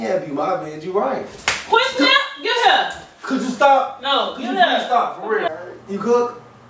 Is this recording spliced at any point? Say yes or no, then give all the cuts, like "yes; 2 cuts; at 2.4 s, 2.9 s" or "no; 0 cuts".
yes; 1 cut; at 5.5 s